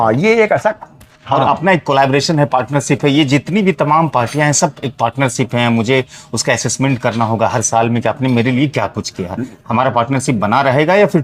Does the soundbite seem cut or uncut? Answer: uncut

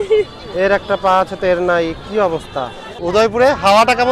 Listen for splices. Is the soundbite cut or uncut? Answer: cut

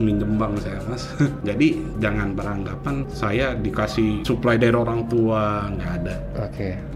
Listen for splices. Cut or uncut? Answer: cut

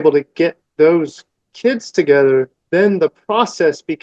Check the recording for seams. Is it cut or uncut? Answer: cut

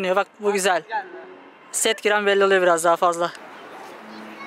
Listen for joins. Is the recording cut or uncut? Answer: cut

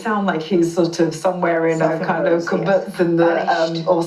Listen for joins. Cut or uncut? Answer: uncut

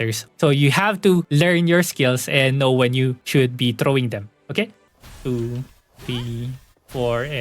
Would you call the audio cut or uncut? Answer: cut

